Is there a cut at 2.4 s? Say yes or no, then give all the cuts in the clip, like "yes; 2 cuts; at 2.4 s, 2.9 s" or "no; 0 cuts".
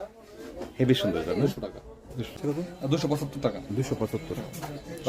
yes; 1 cut; at 2.4 s